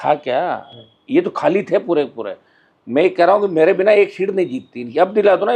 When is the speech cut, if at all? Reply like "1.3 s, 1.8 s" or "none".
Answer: none